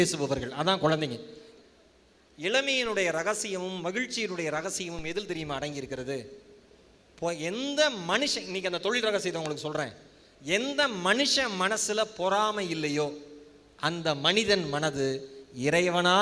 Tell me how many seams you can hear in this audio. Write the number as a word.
one